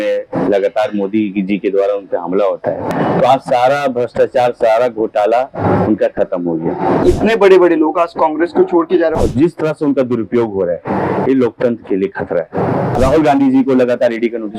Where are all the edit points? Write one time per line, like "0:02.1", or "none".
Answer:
0:02.9
0:07.0
0:09.2
0:13.0